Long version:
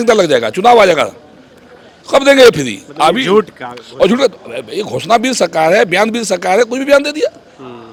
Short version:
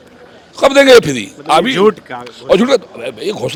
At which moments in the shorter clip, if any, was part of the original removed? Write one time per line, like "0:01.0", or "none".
none

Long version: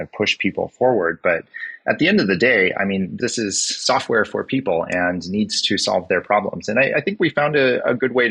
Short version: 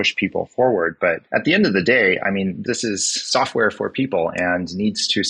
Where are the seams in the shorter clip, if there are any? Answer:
0:01.2

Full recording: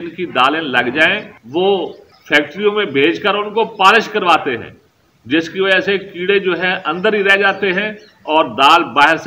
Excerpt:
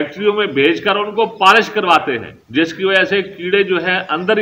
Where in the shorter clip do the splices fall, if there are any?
0:02.3

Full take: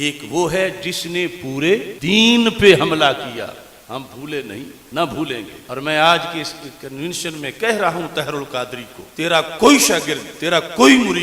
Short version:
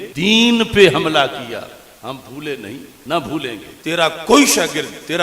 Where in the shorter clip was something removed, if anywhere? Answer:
0:03.7

